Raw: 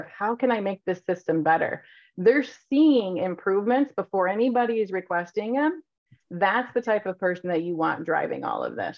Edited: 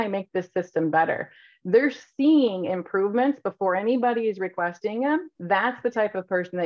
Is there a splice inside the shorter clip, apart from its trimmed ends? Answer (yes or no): yes